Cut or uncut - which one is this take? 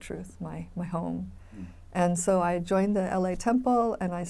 uncut